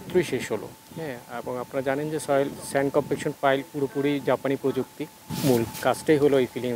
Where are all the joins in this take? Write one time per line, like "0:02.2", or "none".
0:05.2